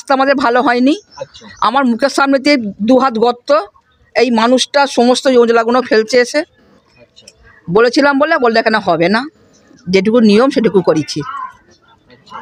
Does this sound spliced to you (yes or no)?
no